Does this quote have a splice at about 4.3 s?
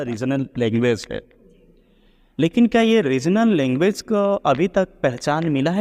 no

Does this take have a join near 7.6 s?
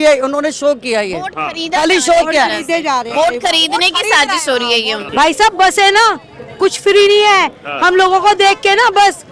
no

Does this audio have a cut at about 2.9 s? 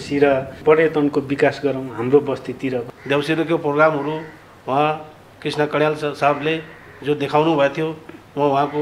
yes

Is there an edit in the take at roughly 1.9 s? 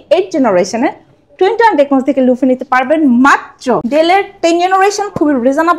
no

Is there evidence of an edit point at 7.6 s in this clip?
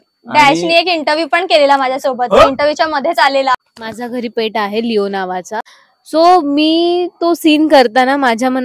no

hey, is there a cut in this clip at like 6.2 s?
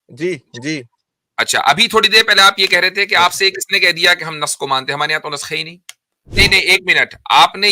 yes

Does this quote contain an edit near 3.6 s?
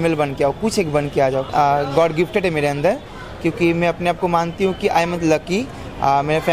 no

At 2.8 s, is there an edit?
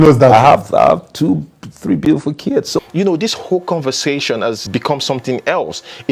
yes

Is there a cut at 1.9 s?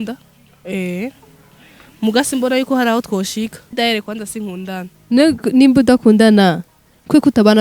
no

